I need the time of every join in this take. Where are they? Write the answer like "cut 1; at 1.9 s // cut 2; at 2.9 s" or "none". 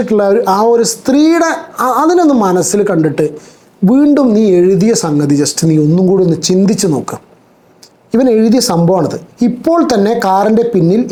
none